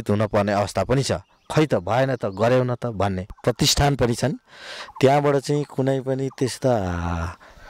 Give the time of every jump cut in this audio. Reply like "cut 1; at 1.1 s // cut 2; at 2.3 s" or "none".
cut 1; at 3.4 s